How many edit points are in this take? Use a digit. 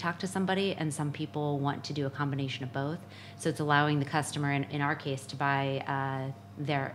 0